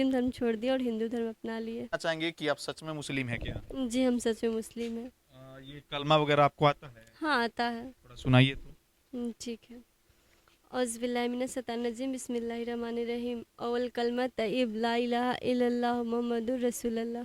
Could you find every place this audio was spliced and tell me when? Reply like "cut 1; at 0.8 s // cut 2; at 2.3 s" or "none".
cut 1; at 2.0 s